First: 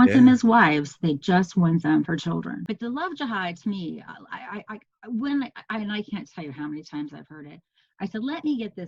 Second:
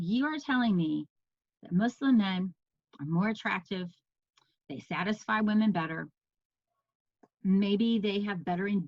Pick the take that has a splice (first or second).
first